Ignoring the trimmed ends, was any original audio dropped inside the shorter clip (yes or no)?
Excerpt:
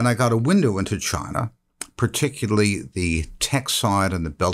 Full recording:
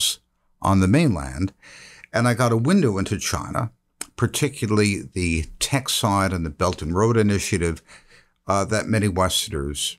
no